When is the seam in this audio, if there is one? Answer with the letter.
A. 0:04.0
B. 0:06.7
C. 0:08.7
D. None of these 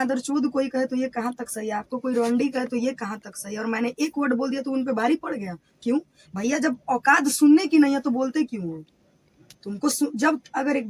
D